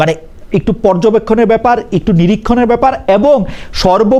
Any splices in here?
no; 0 cuts

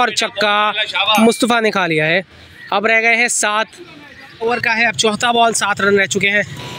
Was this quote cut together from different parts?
no; 0 cuts

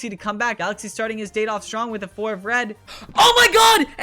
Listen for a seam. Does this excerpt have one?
no; 0 cuts

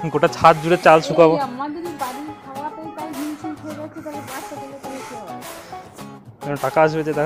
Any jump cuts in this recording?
no; 0 cuts

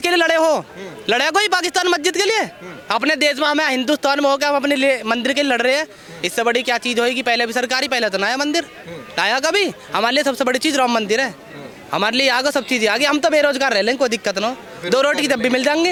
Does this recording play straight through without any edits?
yes; 0 cuts

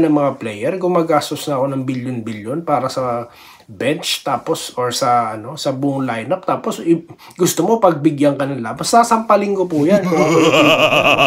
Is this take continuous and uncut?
yes; 0 cuts

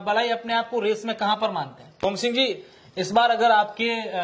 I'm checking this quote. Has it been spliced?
yes; 1 cut; at 2.0 s

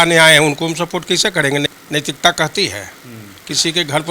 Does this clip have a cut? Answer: no; 0 cuts

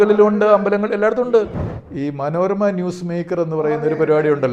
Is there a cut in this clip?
yes; 1 cut; at 1.5 s

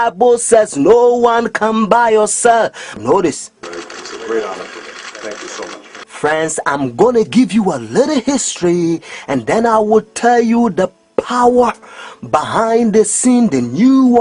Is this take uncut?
yes; 0 cuts

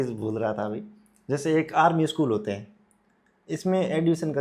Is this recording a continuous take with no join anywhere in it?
yes; 0 cuts

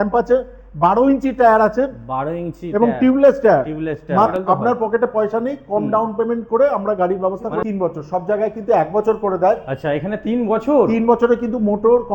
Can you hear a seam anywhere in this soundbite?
yes; 2 cuts; at 4.3 s, 7.6 s

